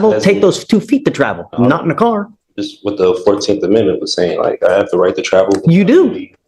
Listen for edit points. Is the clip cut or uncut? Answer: uncut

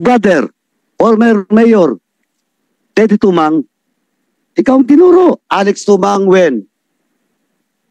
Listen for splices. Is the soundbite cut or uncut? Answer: cut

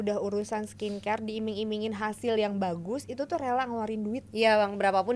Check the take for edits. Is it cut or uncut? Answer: uncut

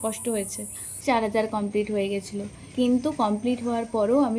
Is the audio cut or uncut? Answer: cut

